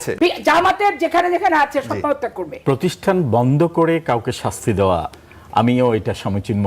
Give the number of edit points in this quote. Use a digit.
1